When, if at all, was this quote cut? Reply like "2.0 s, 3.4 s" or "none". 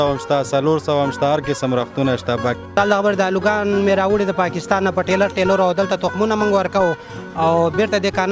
2.6 s